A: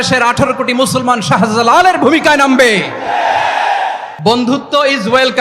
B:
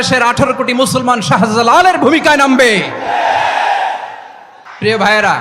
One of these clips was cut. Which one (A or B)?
A